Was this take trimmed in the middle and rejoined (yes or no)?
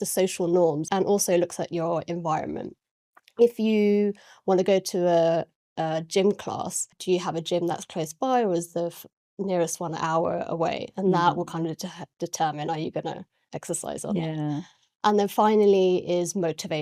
yes